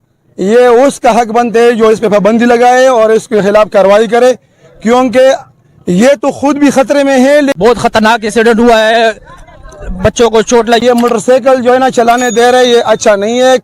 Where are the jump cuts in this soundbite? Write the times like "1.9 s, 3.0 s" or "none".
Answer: 7.5 s, 10.8 s